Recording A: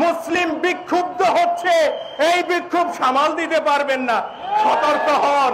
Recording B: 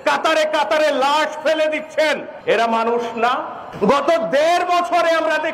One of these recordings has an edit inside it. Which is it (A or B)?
B